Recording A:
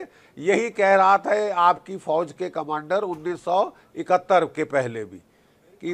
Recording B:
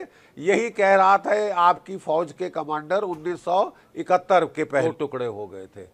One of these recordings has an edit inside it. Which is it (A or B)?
B